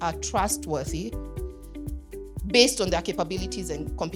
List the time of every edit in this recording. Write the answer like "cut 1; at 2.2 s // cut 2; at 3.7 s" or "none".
none